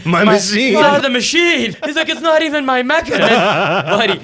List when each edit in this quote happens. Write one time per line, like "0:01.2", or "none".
0:00.8
0:01.8
0:03.1